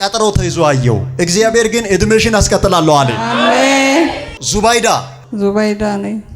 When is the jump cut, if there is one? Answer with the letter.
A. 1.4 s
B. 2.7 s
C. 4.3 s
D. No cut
C